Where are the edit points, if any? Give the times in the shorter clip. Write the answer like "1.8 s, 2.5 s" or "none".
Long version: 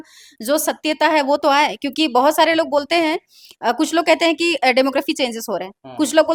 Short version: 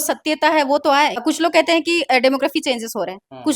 1.2 s